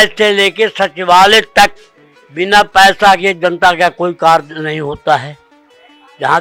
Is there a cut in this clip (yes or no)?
no